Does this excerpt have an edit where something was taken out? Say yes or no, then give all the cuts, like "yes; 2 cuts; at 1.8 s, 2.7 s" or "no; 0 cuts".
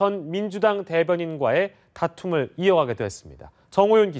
yes; 1 cut; at 1.0 s